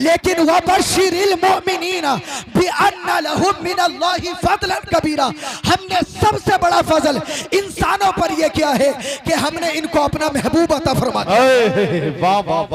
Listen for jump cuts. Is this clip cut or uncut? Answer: uncut